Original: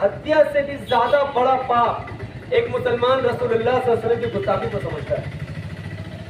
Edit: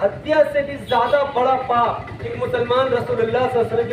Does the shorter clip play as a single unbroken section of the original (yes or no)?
no